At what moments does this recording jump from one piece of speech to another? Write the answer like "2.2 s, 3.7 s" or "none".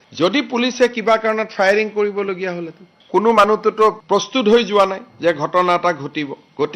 3.0 s